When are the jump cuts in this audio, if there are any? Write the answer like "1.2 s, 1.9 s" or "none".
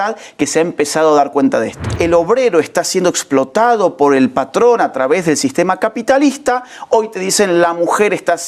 2.0 s